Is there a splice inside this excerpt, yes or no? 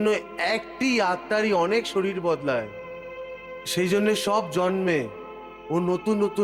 no